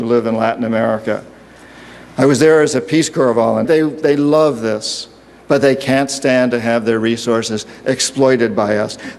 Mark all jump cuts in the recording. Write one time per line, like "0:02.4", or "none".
none